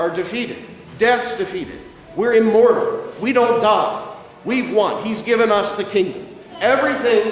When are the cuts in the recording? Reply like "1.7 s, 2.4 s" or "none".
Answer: none